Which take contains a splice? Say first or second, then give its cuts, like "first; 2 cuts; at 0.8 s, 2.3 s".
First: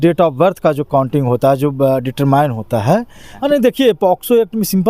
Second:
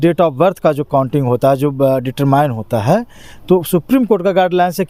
first; 1 cut; at 3.2 s